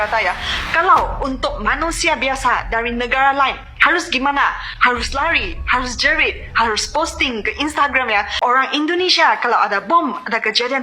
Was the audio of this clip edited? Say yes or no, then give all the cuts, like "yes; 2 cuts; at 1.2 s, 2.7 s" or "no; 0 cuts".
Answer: yes; 1 cut; at 8.3 s